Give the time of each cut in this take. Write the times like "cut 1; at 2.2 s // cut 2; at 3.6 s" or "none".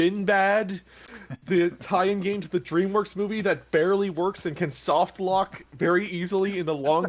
none